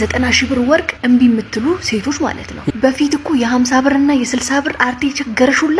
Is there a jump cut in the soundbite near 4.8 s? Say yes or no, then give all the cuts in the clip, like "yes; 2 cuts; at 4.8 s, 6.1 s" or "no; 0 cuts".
no; 2 cuts; at 0.9 s, 2.7 s